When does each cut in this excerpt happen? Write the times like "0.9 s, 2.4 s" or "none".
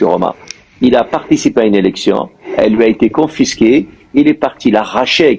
none